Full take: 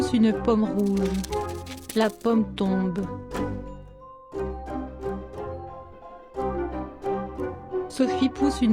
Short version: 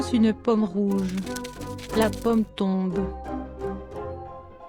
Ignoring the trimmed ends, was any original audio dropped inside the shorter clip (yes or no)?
yes